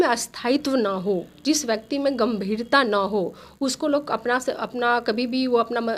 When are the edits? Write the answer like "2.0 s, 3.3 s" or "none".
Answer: none